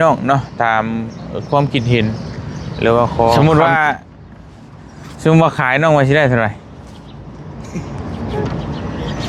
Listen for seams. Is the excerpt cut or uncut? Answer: cut